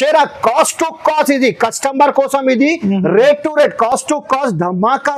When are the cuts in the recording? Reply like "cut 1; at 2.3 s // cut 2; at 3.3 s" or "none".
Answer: none